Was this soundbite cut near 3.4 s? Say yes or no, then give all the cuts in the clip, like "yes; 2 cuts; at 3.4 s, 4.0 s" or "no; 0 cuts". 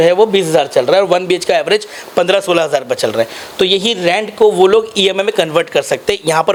no; 0 cuts